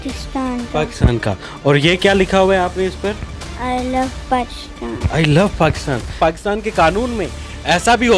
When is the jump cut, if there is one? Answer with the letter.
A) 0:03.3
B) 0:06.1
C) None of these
B